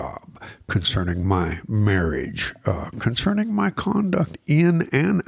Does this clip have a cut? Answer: no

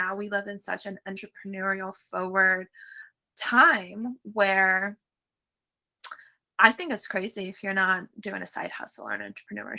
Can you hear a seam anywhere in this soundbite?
no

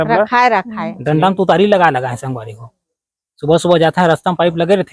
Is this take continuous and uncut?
no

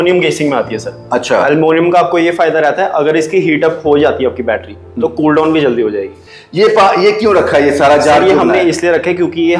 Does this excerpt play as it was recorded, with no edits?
yes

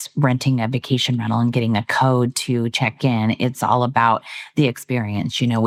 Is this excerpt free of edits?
yes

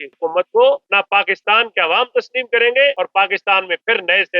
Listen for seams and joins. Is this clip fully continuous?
no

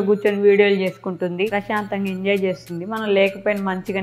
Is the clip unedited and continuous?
no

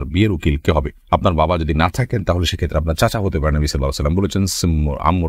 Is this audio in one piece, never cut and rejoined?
yes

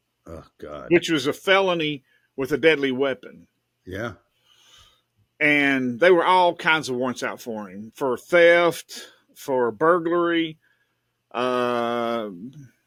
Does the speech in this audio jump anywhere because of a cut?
no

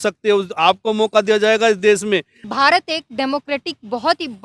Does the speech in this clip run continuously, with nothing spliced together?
no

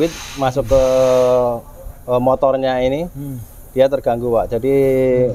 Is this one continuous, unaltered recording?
yes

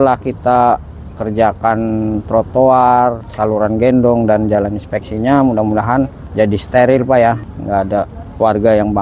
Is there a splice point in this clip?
yes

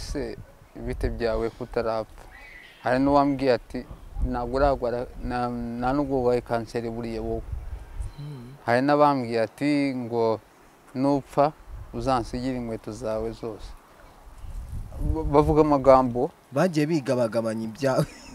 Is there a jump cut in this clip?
no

